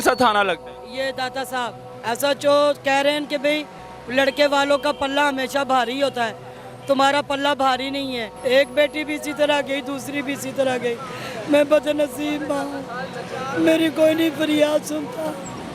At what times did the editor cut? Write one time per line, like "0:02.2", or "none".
0:01.8
0:08.3

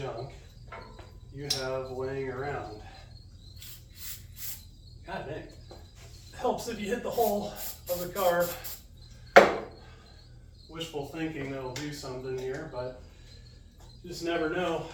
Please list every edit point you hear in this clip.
none

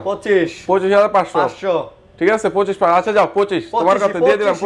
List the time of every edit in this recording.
none

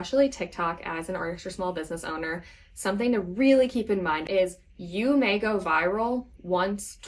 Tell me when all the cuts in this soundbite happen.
0:04.2

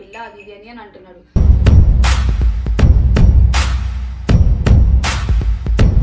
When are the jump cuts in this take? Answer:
none

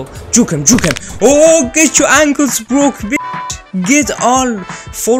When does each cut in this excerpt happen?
none

